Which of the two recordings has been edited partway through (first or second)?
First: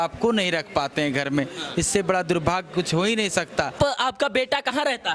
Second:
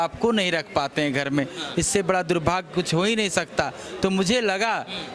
first